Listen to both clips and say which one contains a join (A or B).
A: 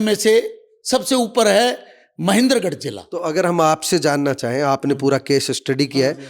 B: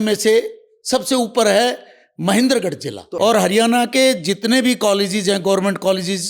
B